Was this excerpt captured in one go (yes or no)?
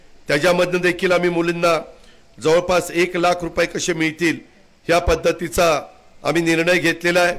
yes